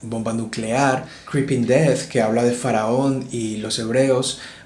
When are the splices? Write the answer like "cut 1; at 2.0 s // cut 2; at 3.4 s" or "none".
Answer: cut 1; at 1.2 s